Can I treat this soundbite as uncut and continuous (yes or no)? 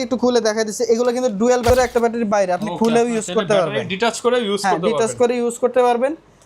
no